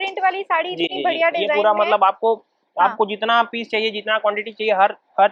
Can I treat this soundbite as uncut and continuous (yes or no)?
yes